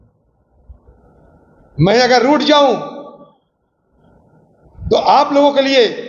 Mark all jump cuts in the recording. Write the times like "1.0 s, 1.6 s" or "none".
1.0 s, 4.0 s